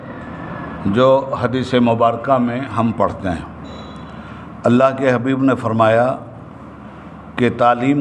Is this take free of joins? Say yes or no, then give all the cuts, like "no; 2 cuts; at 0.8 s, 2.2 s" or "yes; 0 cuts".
yes; 0 cuts